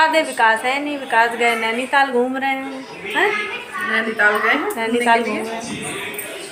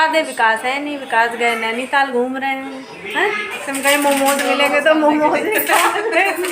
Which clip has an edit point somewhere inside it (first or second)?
second